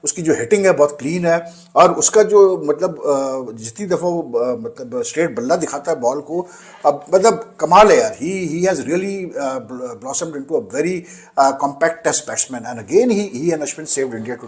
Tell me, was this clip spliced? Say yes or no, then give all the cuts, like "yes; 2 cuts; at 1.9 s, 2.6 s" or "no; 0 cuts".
no; 0 cuts